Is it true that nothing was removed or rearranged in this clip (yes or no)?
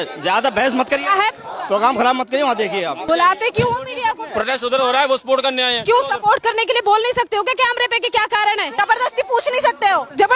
no